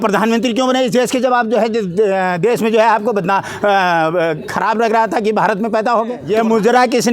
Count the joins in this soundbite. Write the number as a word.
one